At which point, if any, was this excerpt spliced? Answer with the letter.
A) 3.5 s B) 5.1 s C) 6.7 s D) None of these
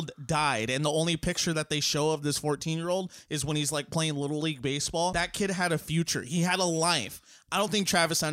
B